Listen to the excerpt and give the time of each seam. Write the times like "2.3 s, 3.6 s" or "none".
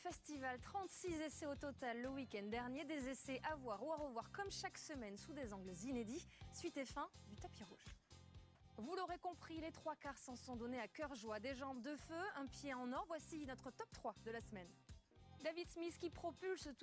3.7 s